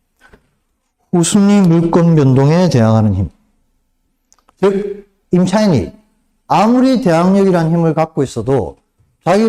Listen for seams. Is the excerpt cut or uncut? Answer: uncut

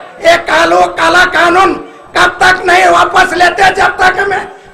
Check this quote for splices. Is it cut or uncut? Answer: uncut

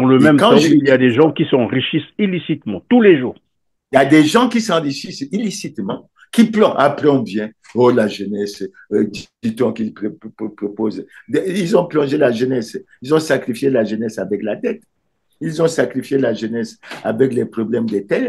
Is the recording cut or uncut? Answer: uncut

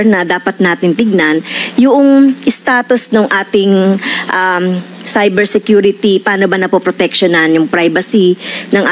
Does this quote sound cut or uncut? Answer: uncut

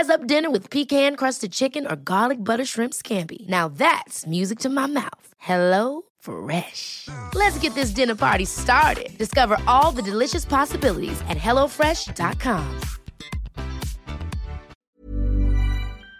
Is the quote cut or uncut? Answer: cut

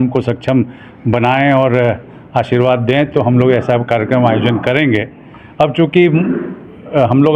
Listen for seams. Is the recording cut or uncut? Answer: uncut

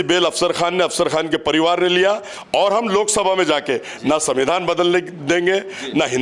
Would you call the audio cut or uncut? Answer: cut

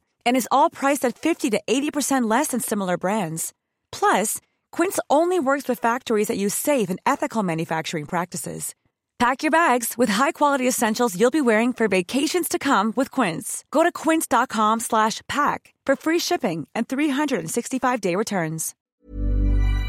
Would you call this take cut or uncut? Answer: cut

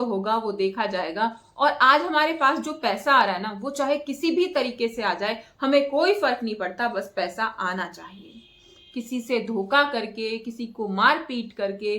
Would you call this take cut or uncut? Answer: uncut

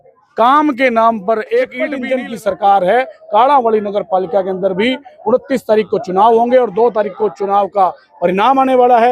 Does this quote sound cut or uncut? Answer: cut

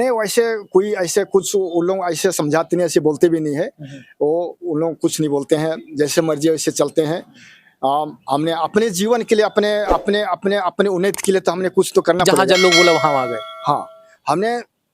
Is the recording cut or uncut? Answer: cut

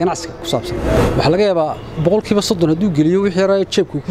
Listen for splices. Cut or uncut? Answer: cut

